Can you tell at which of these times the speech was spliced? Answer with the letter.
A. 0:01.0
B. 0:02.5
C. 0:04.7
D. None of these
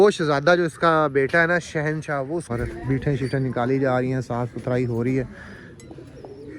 B